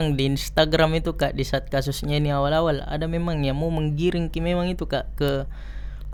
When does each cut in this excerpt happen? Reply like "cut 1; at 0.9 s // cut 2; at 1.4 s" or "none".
none